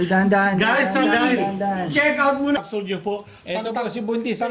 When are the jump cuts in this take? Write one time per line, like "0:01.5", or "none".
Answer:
0:02.6